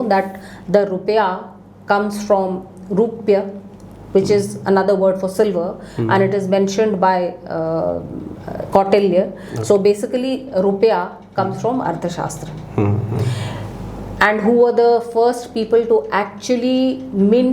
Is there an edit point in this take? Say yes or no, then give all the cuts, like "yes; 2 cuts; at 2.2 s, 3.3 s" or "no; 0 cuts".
no; 0 cuts